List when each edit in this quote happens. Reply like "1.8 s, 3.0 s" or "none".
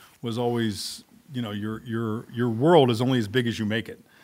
none